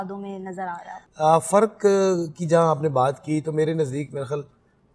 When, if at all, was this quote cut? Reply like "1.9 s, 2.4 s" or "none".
1.0 s

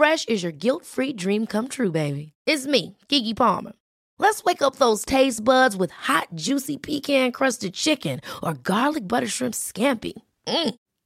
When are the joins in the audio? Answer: none

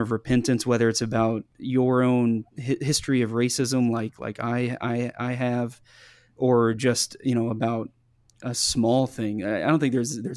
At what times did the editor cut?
1.5 s, 2.5 s

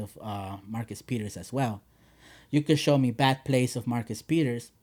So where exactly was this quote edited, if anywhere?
none

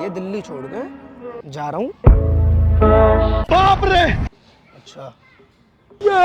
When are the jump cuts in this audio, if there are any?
3.4 s

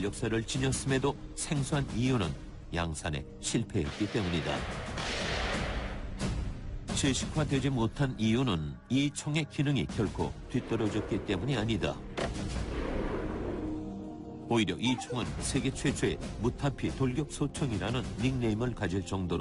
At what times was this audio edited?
5.1 s

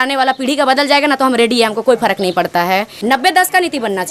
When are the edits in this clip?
2.9 s

